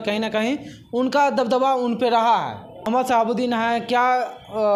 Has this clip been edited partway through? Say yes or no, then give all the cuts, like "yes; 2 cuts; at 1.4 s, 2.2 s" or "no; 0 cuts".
no; 0 cuts